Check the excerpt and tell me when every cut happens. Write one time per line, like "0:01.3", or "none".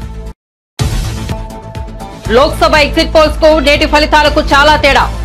0:01.6